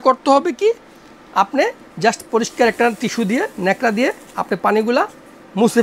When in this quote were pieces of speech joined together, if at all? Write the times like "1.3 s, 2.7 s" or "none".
none